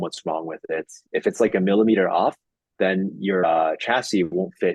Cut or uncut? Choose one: uncut